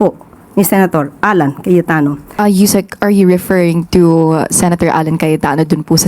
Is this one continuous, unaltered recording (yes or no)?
no